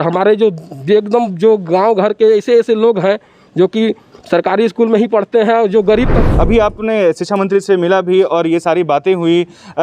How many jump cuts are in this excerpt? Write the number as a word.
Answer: one